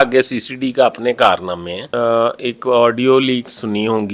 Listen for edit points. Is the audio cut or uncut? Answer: cut